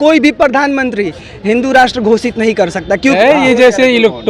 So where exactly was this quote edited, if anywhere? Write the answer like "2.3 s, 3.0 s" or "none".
3.2 s